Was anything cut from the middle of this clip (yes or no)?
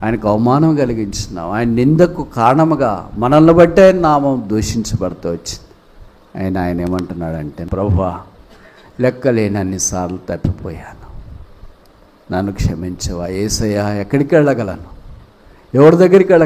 yes